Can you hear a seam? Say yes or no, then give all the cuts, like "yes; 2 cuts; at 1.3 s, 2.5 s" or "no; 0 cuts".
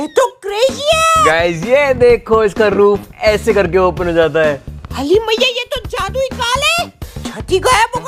no; 0 cuts